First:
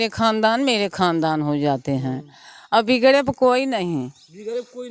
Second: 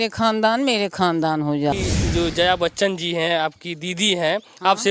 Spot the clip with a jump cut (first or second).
second